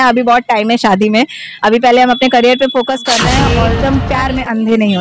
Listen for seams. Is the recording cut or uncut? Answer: cut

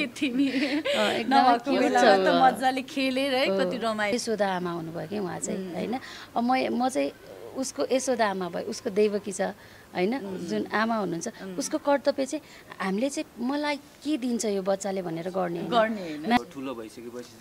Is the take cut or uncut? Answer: cut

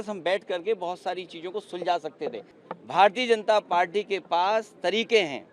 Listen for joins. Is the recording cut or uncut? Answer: cut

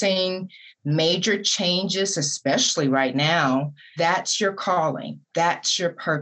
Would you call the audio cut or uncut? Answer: cut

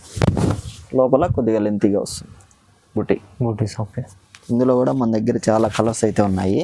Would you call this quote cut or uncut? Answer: uncut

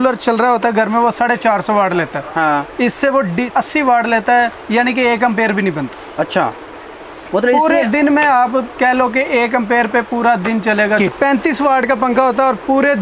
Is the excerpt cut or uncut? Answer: cut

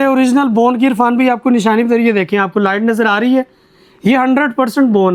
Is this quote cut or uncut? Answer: uncut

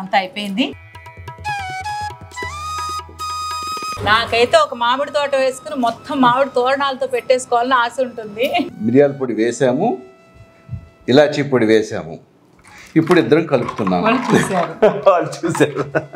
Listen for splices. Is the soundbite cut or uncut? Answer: cut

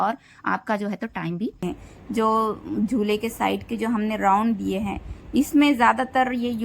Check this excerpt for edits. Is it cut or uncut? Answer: cut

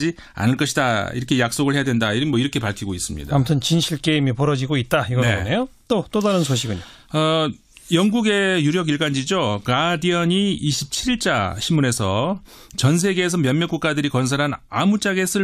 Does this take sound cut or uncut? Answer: uncut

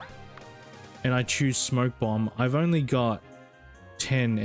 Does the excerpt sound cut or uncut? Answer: uncut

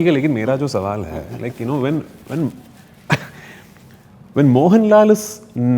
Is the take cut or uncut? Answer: uncut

